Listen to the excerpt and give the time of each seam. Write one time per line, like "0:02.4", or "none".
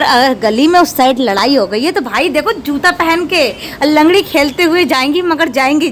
none

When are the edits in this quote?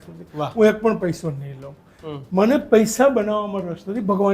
none

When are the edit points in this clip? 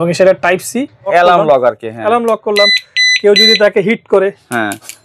0:01.1

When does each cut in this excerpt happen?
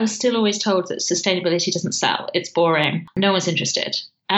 0:03.1

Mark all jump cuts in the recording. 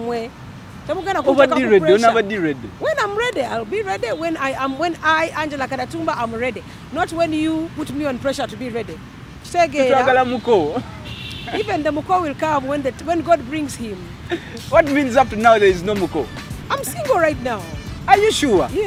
none

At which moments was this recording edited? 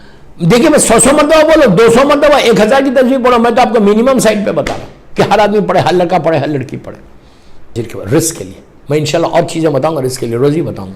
0:07.8

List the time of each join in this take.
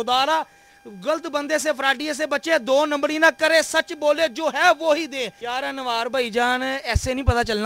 0:05.3

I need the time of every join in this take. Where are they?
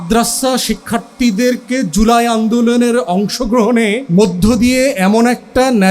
0:04.0

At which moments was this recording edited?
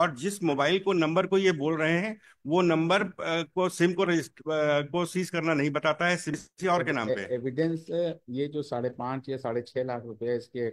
0:06.4

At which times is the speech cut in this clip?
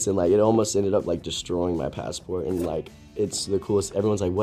none

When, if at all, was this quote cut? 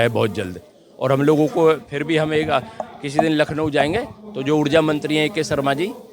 none

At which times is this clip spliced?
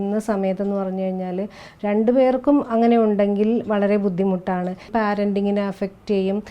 0:04.9

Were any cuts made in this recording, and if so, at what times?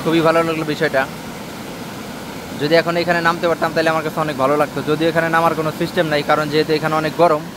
none

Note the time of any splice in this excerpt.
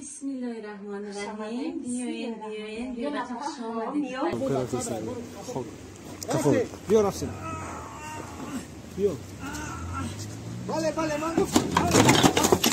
0:04.3

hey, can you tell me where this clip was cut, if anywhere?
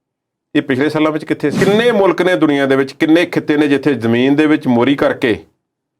0:01.6

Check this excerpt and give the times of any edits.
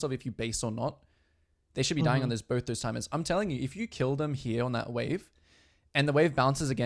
none

